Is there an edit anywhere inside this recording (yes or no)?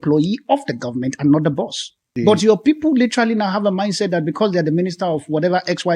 yes